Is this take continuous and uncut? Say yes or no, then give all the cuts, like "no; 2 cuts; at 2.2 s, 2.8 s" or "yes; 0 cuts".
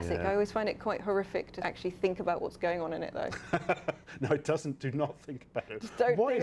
no; 1 cut; at 1.5 s